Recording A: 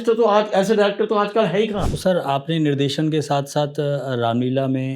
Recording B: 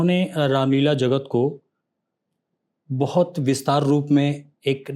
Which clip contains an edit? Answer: A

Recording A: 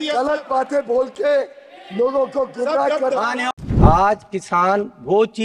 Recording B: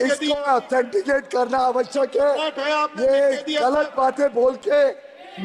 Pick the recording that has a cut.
A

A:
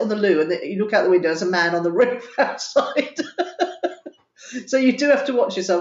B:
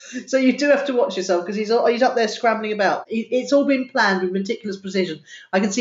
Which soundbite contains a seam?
B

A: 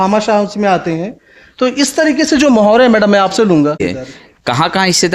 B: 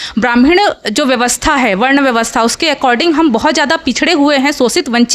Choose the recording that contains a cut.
A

